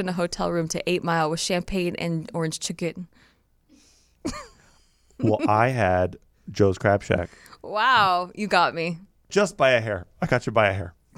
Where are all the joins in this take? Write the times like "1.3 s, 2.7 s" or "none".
9.3 s